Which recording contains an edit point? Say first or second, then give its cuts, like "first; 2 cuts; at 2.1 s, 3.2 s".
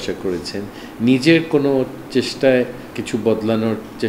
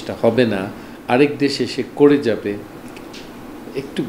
first; 1 cut; at 2.9 s